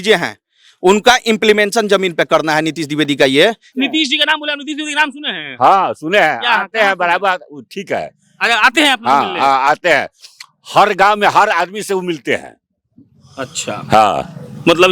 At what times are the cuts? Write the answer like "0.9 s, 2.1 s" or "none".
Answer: 3.7 s